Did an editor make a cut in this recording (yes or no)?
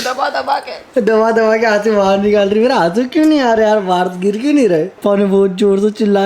yes